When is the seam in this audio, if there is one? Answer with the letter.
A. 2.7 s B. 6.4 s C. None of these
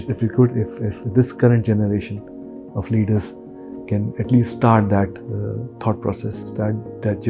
B